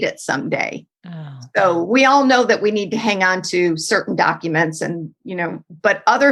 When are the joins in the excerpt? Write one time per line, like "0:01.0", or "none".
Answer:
none